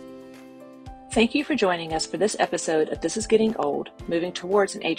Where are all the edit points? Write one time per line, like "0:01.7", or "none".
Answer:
0:01.1

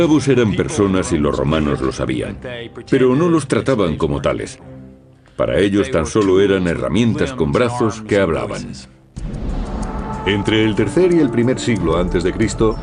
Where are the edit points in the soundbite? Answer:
0:02.7

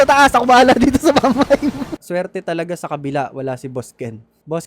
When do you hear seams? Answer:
0:02.0

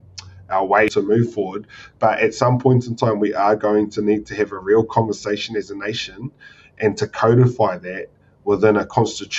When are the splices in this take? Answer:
0:00.9

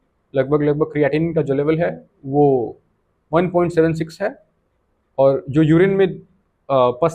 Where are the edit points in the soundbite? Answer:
none

